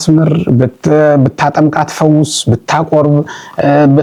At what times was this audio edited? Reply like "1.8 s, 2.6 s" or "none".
none